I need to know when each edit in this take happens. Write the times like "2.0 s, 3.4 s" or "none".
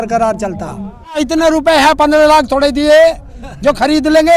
1.2 s